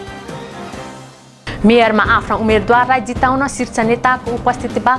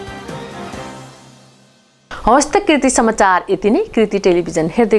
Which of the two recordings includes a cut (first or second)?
first